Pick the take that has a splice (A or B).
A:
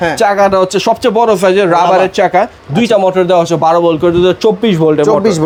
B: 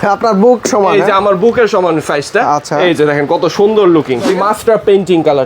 B